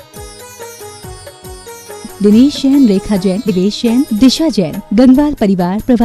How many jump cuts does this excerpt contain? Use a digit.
1